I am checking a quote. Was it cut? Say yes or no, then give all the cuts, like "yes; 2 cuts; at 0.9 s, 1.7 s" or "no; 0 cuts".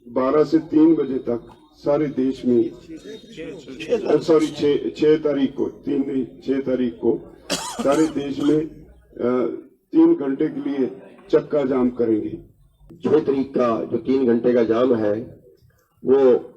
yes; 1 cut; at 12.8 s